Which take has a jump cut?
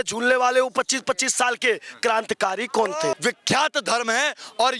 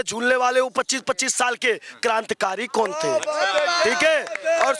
first; 1 cut; at 3.1 s

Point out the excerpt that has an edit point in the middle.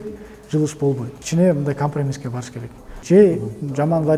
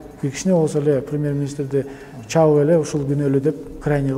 first; 2 cuts; at 1.1 s, 2.9 s

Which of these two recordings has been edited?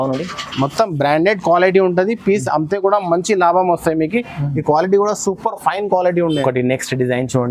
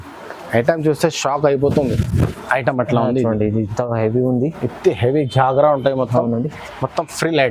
first; 1 cut; at 6.4 s

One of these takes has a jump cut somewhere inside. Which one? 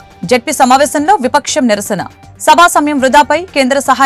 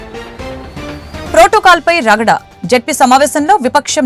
second; 1 cut; at 1.2 s

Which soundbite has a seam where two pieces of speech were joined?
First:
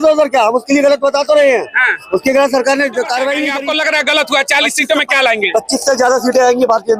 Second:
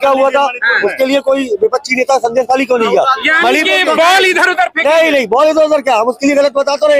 first; 1 cut; at 3.5 s

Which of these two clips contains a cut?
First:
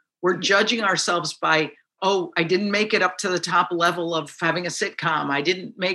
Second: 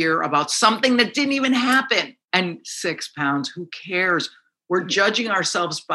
second; 1 cut; at 2.2 s

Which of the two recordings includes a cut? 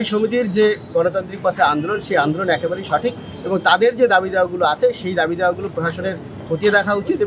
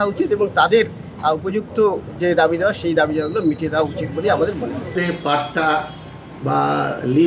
second; 1 cut; at 4.9 s

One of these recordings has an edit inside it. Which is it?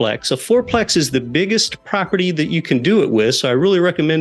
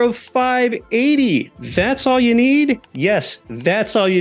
second; 2 cuts; at 1.6 s, 2.9 s

